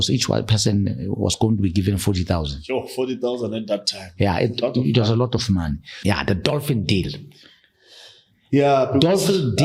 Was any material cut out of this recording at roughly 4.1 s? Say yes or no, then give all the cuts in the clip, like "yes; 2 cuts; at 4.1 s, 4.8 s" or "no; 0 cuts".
no; 1 cut; at 5.9 s